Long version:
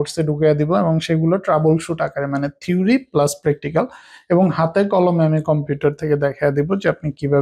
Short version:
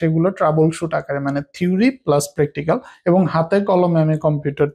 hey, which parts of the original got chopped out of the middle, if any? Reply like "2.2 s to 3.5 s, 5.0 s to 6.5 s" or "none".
4.0 s to 4.1 s